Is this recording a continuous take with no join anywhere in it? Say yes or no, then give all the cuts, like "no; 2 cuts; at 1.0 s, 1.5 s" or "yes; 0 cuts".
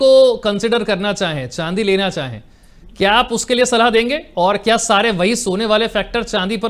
yes; 0 cuts